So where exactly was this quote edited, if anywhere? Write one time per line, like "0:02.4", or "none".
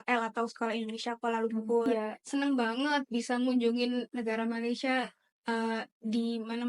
0:02.2